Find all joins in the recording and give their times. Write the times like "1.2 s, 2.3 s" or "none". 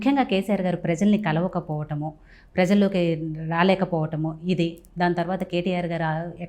none